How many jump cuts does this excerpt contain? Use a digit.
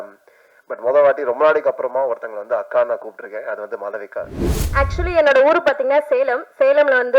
1